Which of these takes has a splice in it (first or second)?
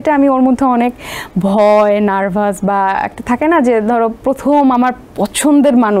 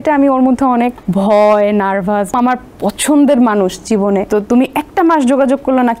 second